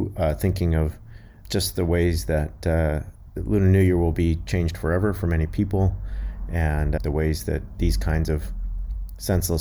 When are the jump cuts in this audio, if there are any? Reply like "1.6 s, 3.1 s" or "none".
1.3 s, 7.0 s